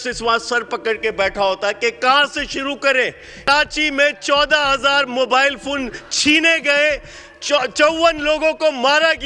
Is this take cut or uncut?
cut